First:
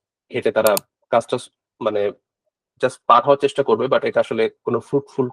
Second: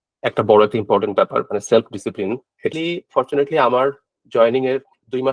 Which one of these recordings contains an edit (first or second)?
second